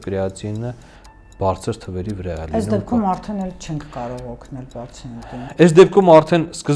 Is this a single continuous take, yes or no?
yes